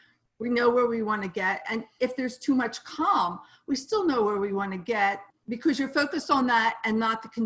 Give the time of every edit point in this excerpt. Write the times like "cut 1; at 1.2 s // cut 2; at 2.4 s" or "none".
cut 1; at 5.3 s